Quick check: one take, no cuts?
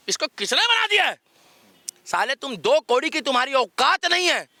yes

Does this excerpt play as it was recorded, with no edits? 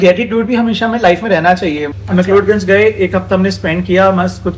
no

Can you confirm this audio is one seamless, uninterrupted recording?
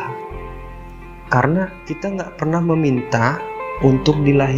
no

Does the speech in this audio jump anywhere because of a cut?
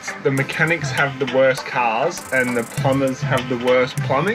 no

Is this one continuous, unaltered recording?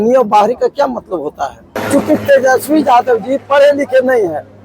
no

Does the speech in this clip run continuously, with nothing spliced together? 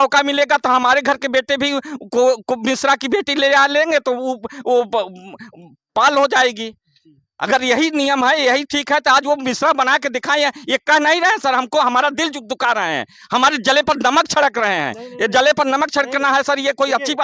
yes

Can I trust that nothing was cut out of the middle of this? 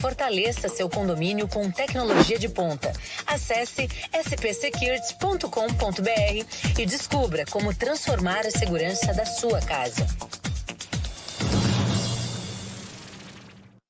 yes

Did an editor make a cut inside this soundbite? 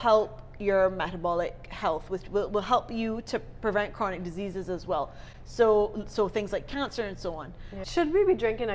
yes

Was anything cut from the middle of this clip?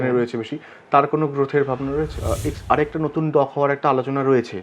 yes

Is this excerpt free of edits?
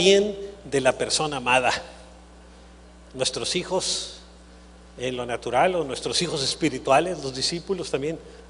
yes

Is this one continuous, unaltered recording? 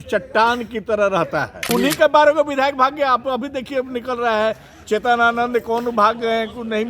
no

